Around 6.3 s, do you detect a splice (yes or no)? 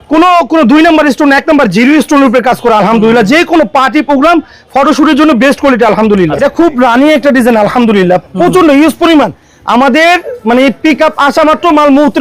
yes